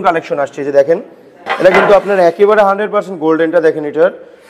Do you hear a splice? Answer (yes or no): no